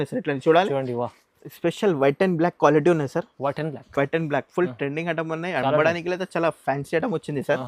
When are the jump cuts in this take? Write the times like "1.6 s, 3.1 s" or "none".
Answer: 1.5 s